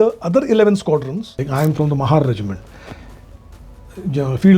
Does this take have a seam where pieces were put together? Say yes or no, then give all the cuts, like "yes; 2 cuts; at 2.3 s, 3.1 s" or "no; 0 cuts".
yes; 1 cut; at 1.4 s